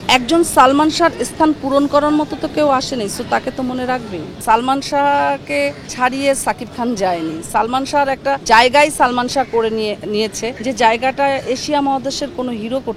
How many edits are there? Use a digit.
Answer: 4